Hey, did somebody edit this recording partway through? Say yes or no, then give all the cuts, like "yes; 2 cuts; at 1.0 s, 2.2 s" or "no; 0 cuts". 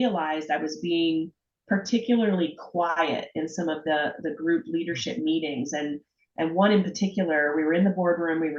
no; 0 cuts